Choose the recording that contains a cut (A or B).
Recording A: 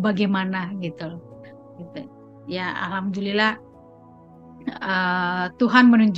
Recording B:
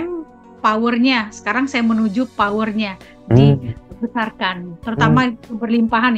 B